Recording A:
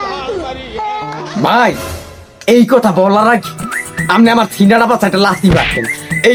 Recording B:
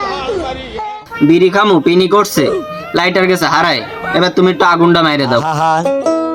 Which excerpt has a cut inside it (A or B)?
B